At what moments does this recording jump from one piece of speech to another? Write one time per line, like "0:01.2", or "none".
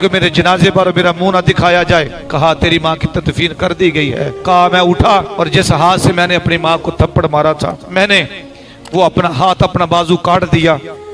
0:02.2
0:04.4
0:05.3
0:07.8